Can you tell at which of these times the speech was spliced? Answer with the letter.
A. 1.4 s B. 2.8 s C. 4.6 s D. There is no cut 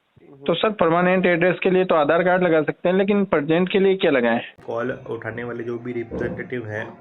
C